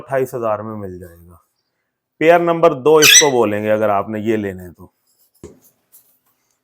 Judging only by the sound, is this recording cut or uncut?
cut